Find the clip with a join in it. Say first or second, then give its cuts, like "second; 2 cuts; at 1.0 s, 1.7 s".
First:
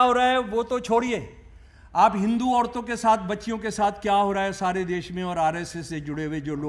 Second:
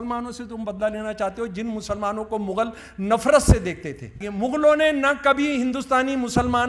second; 1 cut; at 4.2 s